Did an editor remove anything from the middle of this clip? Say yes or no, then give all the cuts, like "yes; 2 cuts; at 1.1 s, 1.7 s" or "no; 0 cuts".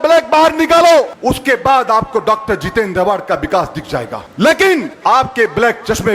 yes; 3 cuts; at 1.1 s, 4.2 s, 4.9 s